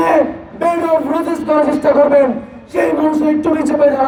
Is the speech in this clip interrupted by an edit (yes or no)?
no